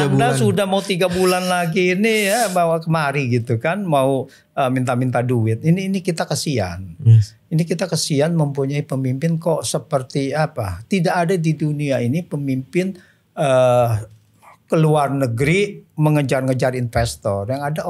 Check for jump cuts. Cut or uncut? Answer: uncut